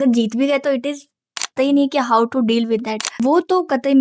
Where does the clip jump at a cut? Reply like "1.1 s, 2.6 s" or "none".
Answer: 1.5 s, 3.0 s